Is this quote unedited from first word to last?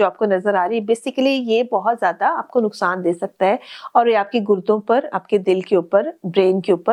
yes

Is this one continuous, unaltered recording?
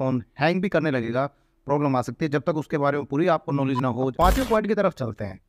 no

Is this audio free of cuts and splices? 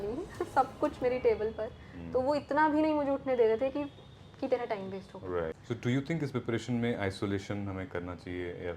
no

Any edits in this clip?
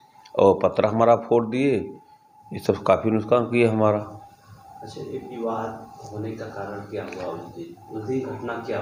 no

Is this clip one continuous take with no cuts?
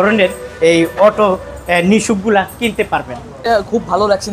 no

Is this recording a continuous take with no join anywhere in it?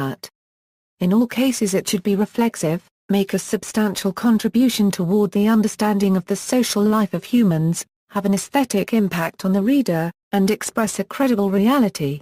yes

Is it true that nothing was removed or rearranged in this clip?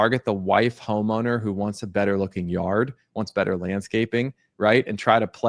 yes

